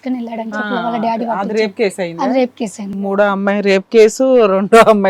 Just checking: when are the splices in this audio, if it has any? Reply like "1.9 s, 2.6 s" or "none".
2.9 s